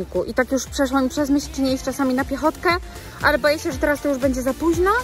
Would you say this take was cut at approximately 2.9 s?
no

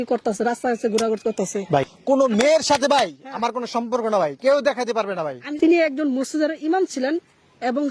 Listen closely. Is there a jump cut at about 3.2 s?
no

